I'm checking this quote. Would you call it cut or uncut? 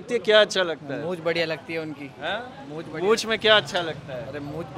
uncut